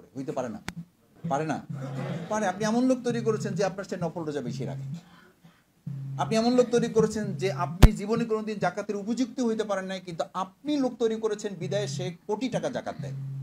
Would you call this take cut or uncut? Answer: cut